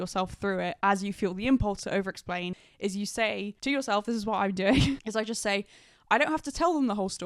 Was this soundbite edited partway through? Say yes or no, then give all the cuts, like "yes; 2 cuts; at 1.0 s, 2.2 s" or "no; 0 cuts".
yes; 2 cuts; at 2.6 s, 3.5 s